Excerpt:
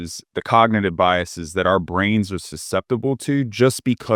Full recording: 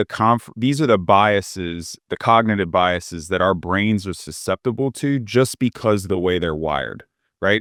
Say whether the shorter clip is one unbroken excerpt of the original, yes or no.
yes